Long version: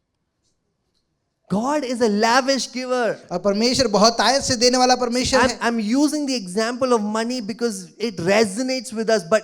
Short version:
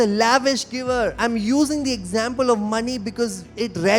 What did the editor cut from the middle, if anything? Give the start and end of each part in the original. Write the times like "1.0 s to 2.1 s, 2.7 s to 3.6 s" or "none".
3.2 s to 5.6 s